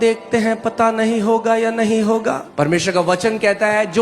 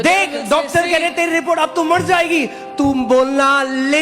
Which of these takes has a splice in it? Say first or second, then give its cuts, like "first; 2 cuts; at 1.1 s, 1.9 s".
first; 1 cut; at 2.5 s